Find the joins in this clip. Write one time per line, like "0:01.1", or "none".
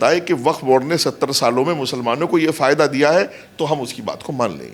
none